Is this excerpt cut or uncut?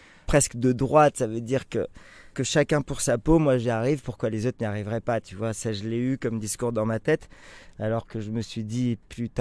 cut